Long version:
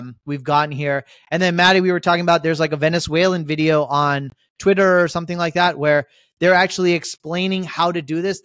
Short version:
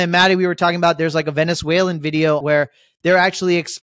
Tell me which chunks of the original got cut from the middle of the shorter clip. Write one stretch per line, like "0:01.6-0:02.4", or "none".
0:03.9-0:05.8